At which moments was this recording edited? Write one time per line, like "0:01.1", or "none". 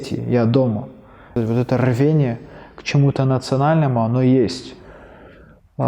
0:01.3